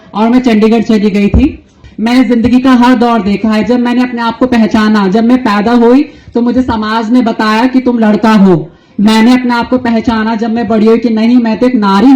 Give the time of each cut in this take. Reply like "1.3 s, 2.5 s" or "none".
1.8 s